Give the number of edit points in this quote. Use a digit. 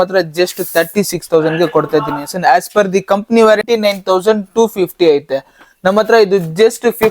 1